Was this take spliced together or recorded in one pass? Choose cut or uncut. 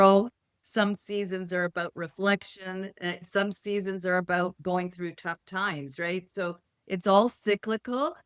uncut